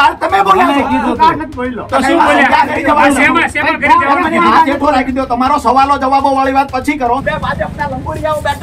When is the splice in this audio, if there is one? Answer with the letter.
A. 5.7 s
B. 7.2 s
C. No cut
B